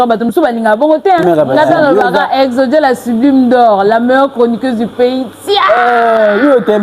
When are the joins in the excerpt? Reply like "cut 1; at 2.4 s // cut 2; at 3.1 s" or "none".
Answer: cut 1; at 1.2 s